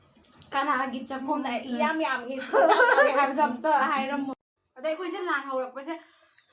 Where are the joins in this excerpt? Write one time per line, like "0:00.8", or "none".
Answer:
0:04.5

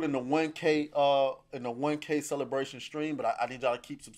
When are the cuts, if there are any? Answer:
none

